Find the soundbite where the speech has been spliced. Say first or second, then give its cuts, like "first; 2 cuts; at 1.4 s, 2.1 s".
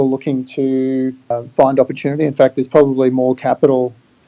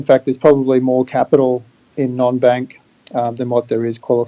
first; 1 cut; at 1.3 s